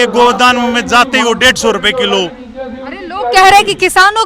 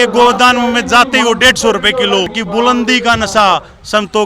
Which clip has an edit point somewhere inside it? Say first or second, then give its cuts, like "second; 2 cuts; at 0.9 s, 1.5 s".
second; 1 cut; at 2.4 s